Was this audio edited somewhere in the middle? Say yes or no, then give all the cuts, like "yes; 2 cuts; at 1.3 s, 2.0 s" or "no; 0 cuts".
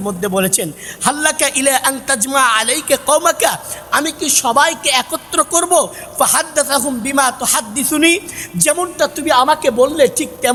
no; 0 cuts